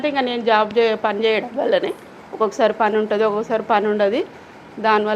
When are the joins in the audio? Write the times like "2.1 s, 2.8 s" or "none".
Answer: none